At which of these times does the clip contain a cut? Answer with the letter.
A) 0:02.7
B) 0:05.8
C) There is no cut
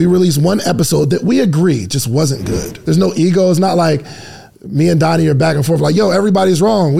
A